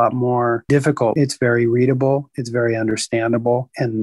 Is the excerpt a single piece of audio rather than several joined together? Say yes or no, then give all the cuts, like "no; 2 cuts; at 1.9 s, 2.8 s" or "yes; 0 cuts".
no; 1 cut; at 1.1 s